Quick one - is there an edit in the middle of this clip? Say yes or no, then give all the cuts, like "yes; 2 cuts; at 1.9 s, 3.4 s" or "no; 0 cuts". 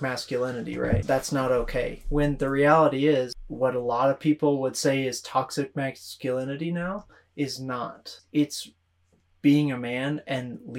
yes; 3 cuts; at 1.0 s, 3.4 s, 8.2 s